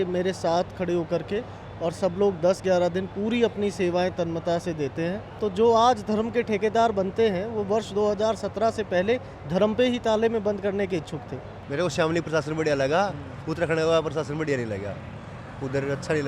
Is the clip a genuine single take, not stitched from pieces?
no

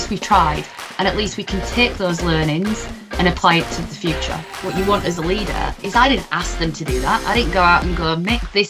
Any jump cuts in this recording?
yes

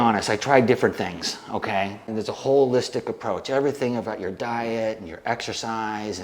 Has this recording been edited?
yes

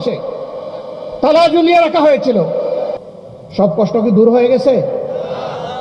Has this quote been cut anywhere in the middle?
yes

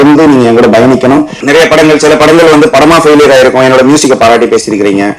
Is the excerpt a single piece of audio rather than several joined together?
no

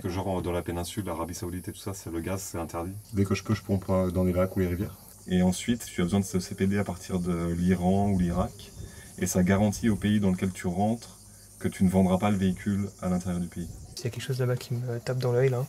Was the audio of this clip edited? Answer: yes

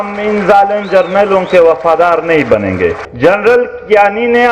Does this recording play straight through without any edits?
no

